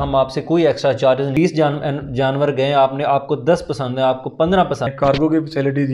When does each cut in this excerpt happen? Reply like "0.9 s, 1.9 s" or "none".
1.3 s, 4.9 s